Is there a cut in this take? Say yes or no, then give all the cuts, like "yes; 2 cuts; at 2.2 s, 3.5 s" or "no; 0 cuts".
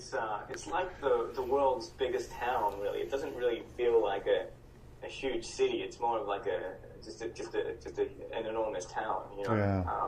yes; 1 cut; at 8.1 s